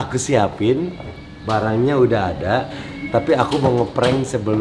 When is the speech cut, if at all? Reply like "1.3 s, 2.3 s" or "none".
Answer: none